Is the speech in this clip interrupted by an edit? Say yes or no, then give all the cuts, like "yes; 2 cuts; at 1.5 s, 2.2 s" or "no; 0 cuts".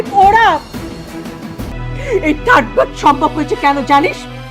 yes; 1 cut; at 1.6 s